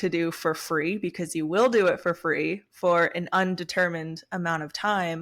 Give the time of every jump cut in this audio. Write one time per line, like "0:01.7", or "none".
none